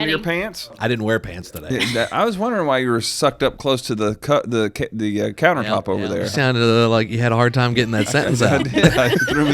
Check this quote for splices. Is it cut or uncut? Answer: cut